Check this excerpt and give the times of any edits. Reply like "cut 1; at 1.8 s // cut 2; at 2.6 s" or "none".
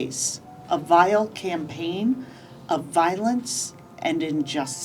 none